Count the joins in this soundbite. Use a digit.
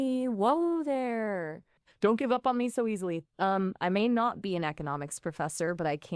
1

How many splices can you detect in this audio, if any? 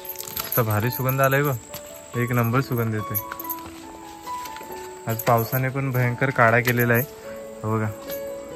0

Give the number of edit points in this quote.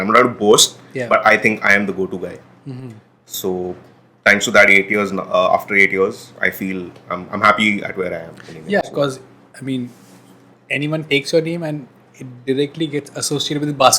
0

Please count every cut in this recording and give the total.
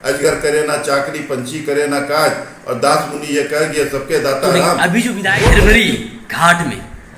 1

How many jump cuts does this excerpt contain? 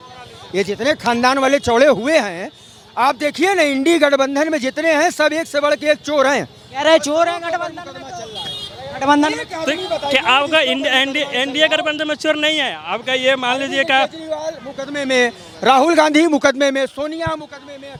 0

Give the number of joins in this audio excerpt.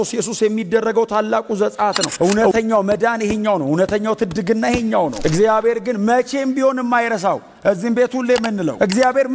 2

